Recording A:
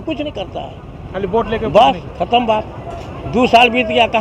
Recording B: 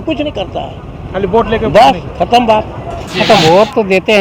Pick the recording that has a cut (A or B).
B